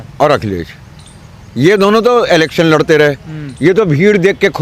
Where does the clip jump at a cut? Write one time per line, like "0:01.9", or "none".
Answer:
none